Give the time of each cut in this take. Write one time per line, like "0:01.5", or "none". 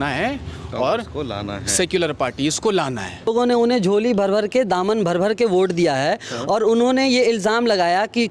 0:03.3